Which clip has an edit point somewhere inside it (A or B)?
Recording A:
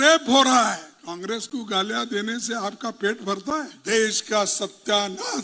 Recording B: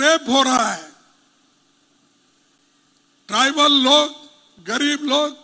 A